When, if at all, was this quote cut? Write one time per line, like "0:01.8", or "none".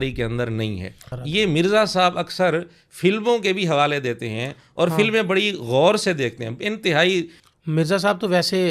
0:01.0
0:07.4

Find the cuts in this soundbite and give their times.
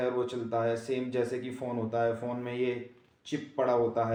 none

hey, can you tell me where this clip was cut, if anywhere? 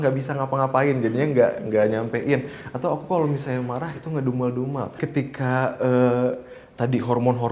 0:05.0

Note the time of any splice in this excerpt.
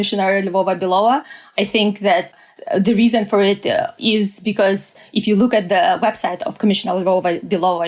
0:02.3
0:03.9

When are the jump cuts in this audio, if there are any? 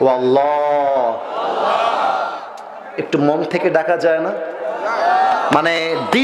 none

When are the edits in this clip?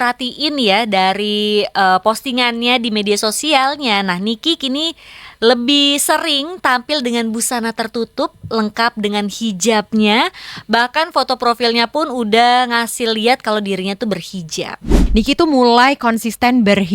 0:14.9

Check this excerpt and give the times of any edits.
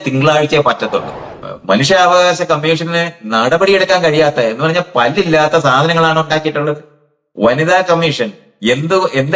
0:01.3

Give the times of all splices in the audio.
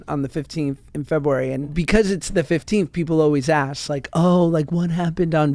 0:01.8

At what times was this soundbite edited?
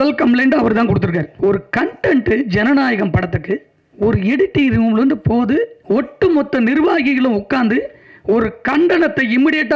0:01.3
0:03.8
0:05.8

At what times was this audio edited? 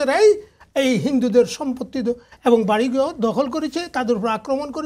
none

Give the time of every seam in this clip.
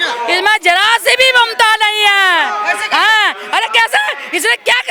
none

